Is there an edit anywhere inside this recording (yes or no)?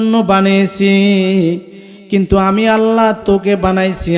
no